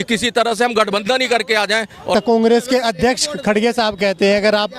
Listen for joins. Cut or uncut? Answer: cut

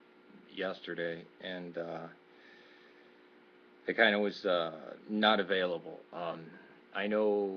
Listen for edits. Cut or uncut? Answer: uncut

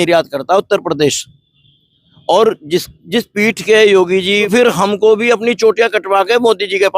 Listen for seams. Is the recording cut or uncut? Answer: cut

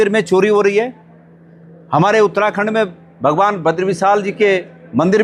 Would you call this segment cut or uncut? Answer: uncut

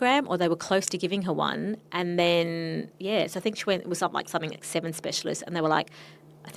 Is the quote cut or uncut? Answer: uncut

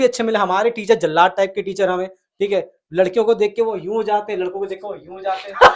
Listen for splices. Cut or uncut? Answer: uncut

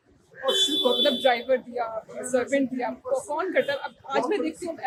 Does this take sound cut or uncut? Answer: uncut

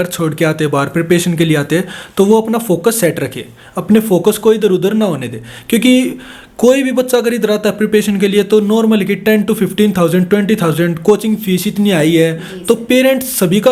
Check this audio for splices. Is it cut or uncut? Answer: uncut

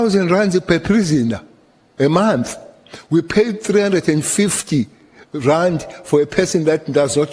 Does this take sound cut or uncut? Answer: uncut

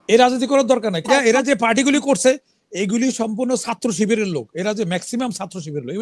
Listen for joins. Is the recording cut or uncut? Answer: cut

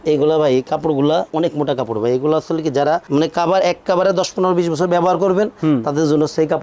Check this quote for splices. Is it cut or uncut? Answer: uncut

